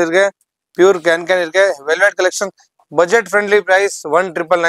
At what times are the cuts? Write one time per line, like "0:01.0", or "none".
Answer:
none